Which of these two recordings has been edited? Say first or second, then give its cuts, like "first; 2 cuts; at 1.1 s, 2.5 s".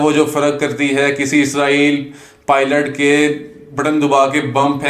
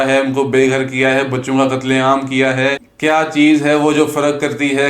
second; 1 cut; at 2.9 s